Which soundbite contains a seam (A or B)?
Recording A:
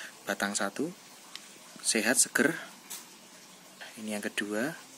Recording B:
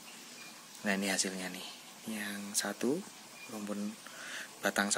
A